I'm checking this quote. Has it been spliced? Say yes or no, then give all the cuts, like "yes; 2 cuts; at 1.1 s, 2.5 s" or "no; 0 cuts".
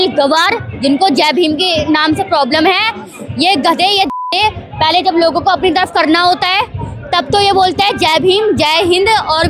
no; 0 cuts